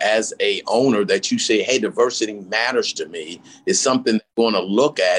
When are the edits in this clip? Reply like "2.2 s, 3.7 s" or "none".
4.3 s